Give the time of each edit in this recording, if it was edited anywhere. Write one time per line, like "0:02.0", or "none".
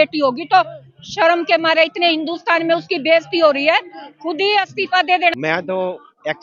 0:05.3